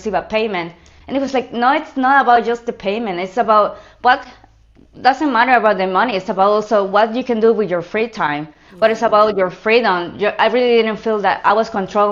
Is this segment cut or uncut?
uncut